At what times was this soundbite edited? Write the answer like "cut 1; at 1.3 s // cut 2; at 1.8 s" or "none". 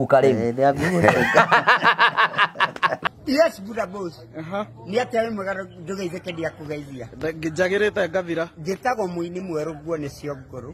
cut 1; at 3.0 s